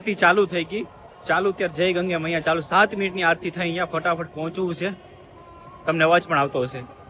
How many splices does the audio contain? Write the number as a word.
zero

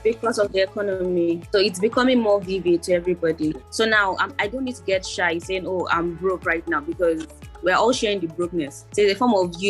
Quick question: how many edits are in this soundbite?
three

